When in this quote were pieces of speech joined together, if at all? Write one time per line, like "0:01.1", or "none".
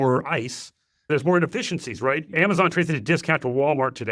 0:01.1
0:02.3